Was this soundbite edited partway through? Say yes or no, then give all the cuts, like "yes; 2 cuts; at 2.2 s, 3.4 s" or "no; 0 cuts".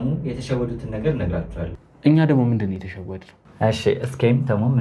no; 0 cuts